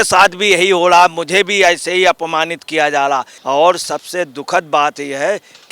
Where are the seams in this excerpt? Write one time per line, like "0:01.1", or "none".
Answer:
0:03.3